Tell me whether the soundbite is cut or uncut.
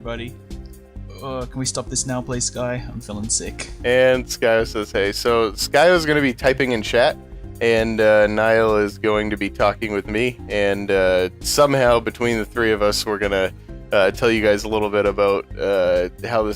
uncut